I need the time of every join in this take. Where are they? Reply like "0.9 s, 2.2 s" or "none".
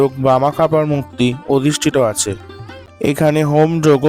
3.1 s